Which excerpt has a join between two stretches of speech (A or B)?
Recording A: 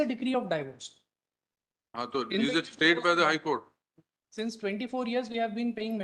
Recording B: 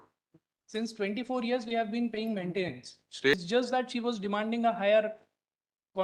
B